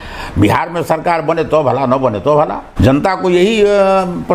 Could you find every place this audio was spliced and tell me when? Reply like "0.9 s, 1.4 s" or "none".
2.6 s